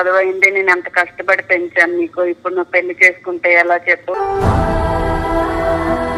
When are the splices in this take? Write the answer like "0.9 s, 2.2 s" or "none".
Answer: none